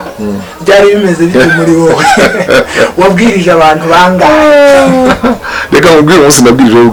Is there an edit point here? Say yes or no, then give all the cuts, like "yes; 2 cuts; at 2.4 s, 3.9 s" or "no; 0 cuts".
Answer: no; 0 cuts